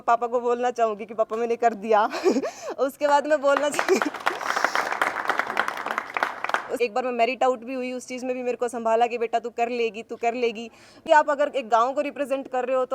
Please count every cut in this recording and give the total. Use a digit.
2